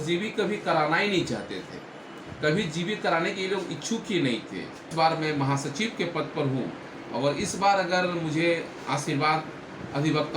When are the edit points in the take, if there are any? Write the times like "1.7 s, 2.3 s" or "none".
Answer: 4.9 s